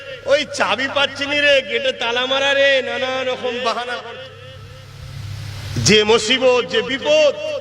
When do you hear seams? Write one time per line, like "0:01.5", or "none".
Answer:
0:04.0